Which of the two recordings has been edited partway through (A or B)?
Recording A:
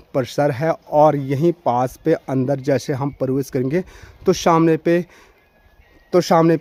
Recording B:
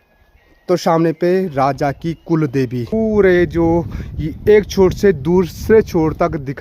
B